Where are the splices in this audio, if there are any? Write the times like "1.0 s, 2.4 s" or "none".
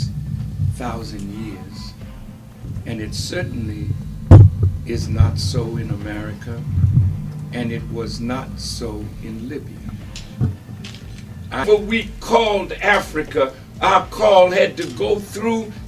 11.6 s